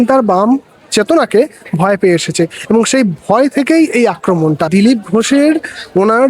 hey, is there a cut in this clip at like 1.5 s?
no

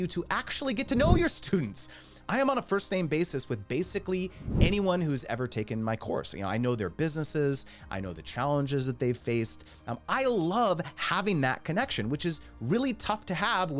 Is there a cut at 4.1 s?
no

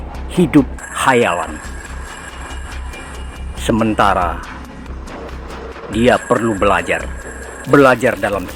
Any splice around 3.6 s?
yes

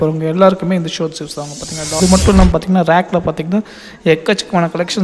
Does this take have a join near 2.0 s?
yes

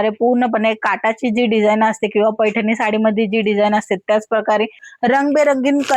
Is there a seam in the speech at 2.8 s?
no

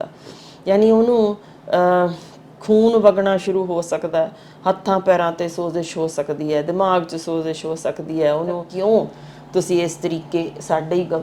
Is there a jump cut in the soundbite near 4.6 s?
no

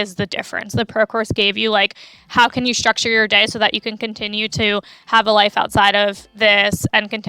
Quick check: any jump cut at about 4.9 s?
no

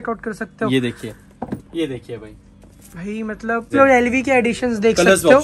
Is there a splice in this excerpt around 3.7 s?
yes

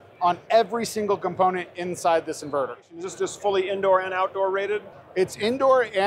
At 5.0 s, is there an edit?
no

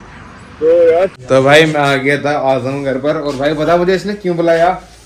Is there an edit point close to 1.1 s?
yes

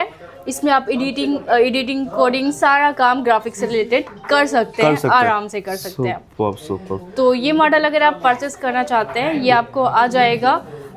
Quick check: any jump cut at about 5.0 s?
no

